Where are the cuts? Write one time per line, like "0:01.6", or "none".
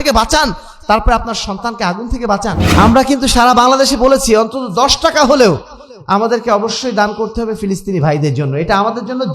0:02.6